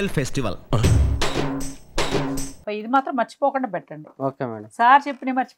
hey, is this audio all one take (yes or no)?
no